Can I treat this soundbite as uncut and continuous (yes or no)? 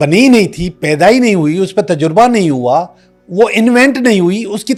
yes